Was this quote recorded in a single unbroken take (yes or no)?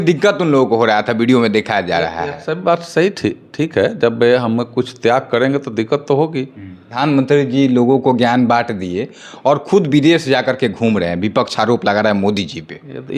no